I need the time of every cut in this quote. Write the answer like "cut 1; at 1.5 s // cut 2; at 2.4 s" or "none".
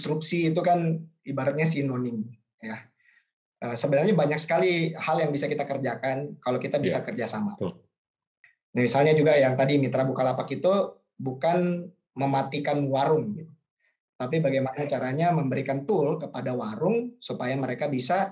cut 1; at 2.9 s // cut 2; at 8.2 s